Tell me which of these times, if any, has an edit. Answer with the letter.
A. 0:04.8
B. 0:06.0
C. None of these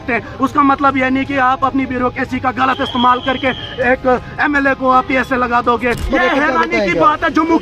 B